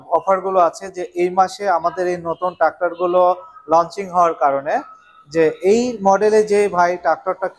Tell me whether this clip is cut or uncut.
uncut